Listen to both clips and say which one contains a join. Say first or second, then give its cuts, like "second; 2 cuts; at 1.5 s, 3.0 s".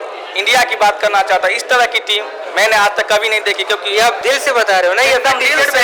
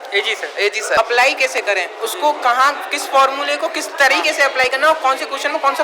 second; 1 cut; at 1.0 s